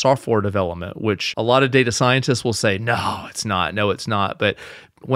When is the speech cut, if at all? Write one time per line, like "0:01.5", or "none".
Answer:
0:01.2